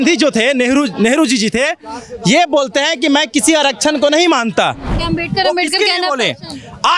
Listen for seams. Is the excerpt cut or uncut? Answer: cut